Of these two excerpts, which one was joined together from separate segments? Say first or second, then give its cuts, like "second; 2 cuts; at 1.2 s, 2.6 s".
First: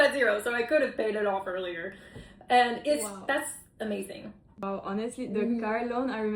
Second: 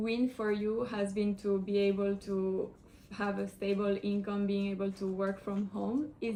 first; 1 cut; at 4.6 s